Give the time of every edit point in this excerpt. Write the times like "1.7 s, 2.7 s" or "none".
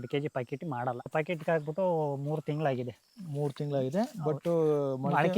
1.1 s

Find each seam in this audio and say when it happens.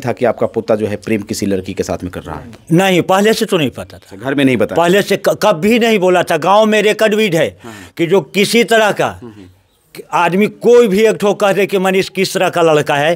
none

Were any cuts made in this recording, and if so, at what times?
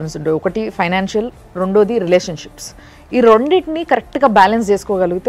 none

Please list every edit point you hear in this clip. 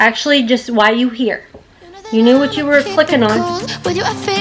3.4 s

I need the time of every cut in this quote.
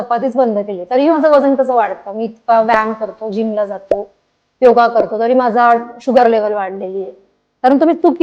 none

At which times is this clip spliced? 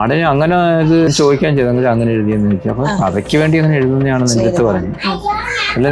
1.1 s

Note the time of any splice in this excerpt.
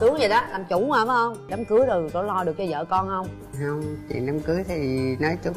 1.6 s

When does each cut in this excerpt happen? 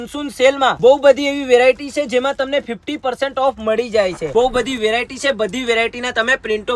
4.3 s

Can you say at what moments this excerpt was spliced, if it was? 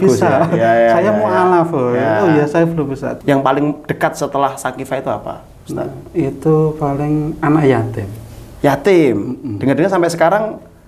3.2 s

